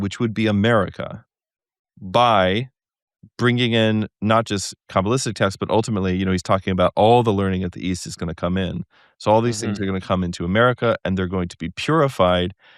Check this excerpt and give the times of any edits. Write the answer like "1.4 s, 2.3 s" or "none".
none